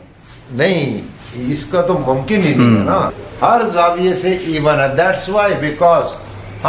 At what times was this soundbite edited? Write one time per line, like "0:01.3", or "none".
0:03.2